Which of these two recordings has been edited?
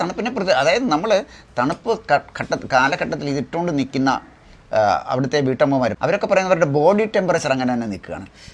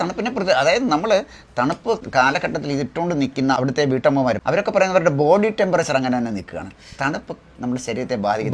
second; 2 cuts; at 2.0 s, 3.6 s

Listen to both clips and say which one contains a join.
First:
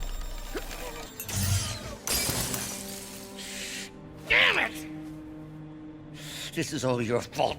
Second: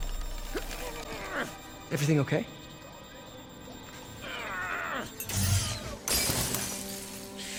first; 1 cut; at 1.1 s

